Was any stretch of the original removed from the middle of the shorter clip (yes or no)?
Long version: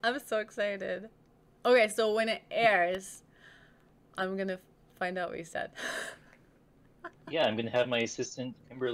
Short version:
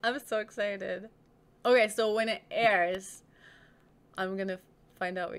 no